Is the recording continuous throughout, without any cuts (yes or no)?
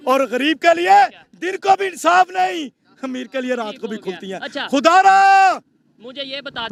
yes